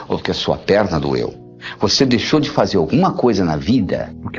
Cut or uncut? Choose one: uncut